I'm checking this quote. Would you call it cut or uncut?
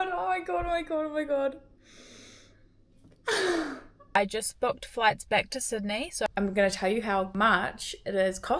cut